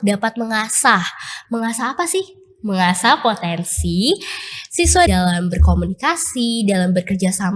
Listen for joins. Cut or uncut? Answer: uncut